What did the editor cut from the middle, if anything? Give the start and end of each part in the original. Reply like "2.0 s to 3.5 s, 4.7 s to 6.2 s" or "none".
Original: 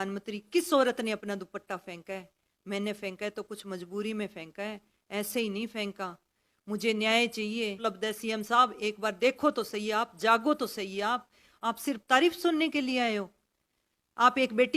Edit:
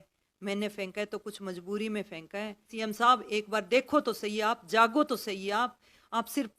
5.0 s to 8.2 s